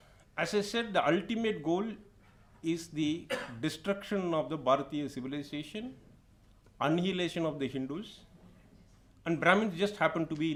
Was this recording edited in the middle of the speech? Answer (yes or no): no